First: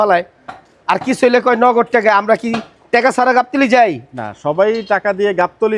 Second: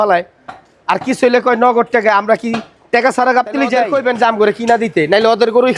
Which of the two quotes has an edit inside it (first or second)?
second